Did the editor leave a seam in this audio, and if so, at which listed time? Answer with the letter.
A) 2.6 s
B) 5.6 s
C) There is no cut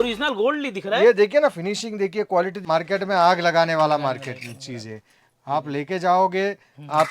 A